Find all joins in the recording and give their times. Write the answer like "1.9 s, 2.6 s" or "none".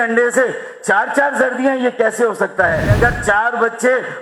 2.9 s